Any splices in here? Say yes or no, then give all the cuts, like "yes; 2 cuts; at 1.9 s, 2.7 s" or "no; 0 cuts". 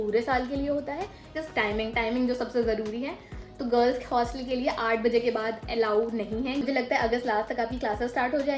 yes; 2 cuts; at 1.3 s, 6.6 s